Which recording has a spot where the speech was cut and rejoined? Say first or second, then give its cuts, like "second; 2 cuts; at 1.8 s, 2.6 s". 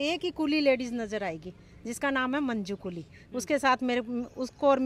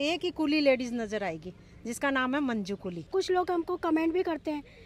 second; 1 cut; at 3.0 s